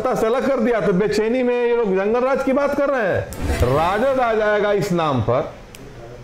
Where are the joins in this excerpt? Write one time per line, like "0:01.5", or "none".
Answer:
0:03.4